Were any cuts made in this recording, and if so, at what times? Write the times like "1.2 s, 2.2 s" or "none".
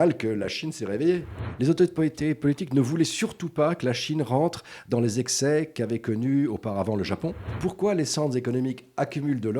1.4 s, 7.5 s